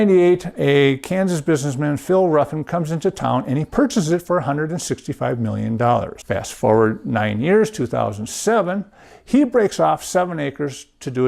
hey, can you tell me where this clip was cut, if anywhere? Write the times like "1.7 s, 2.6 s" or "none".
6.2 s